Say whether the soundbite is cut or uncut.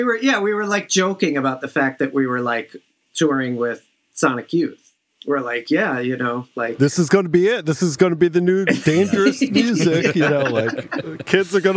uncut